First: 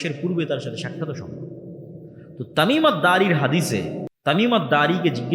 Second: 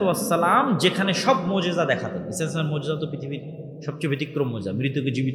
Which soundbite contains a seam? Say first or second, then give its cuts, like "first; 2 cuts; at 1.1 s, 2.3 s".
first; 1 cut; at 4.0 s